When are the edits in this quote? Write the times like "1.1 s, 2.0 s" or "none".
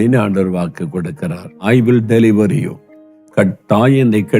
1.6 s